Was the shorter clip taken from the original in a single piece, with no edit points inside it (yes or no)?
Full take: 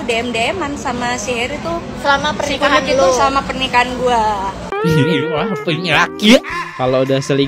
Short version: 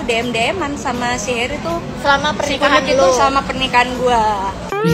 yes